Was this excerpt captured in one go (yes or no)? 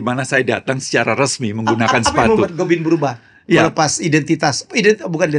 yes